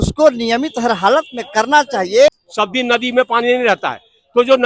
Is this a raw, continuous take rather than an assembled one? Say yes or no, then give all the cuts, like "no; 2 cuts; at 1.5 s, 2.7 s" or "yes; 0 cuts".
no; 1 cut; at 2.3 s